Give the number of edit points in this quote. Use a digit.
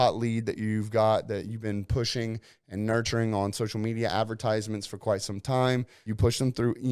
1